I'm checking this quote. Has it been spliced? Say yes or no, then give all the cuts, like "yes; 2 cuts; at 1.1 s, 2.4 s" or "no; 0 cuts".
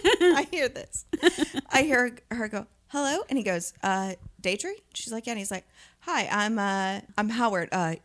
yes; 1 cut; at 7.1 s